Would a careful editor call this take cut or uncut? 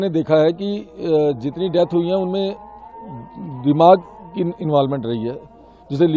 uncut